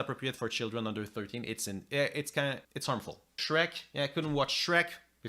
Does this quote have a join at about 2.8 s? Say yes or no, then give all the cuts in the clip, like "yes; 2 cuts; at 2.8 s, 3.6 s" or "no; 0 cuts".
yes; 1 cut; at 2.8 s